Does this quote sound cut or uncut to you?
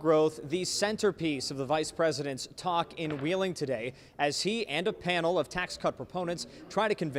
uncut